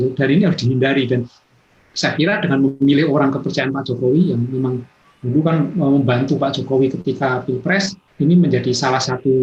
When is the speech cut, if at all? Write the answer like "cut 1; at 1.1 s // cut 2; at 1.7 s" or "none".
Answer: cut 1; at 8.0 s